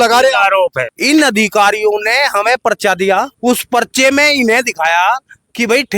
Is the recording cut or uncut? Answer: cut